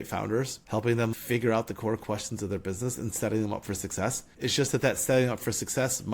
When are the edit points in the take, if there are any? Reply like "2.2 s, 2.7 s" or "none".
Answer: 1.1 s